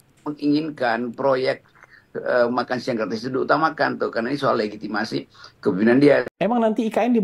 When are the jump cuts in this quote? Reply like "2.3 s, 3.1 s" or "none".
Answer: 6.3 s